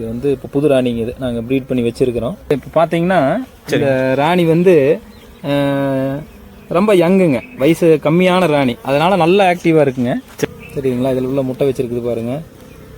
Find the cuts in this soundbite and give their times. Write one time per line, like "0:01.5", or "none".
0:02.5